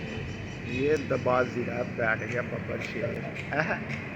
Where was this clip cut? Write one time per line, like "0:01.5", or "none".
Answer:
none